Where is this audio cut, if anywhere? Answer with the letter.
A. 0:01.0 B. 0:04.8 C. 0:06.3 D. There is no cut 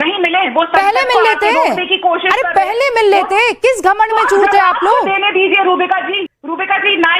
C